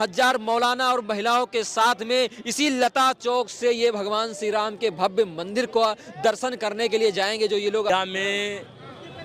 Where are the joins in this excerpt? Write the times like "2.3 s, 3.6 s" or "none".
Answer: 7.9 s